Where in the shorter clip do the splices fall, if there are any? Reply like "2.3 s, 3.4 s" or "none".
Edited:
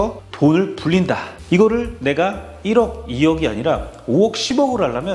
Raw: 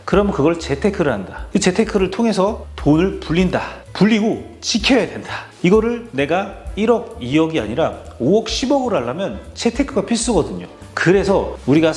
1.3 s

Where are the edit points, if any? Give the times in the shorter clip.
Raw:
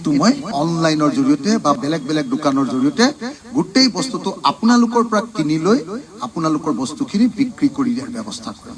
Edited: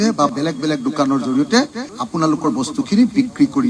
1.9 s

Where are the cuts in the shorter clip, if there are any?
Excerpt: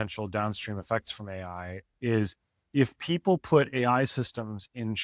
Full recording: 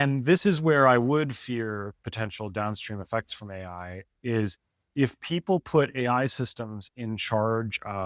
none

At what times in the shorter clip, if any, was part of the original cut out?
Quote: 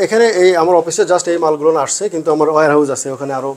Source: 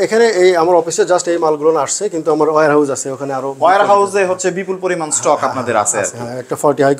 none

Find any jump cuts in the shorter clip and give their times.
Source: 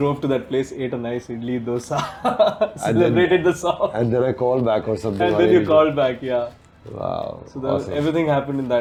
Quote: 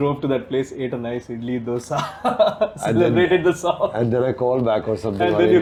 none

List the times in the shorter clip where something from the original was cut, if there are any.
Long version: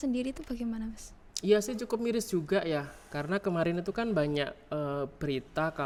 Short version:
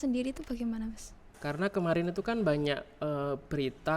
1.3 s

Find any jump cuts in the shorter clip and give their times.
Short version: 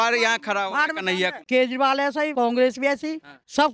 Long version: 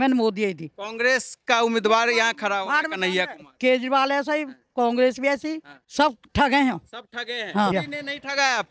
1.4 s, 2.3 s

